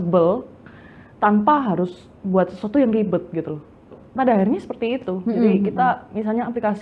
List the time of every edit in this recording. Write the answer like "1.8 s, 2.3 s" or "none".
4.0 s